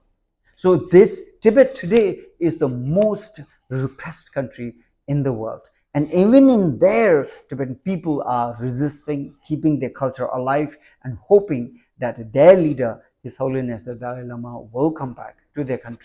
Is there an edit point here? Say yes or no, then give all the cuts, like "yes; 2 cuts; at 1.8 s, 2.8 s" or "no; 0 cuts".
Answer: no; 0 cuts